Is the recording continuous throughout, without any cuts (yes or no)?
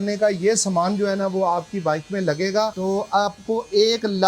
no